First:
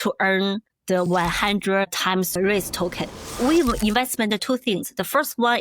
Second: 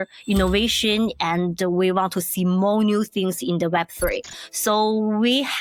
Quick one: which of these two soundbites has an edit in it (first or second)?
first